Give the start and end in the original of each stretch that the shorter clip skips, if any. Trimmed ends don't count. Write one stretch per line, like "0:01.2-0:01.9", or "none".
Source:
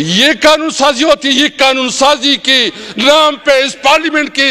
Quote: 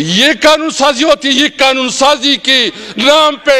none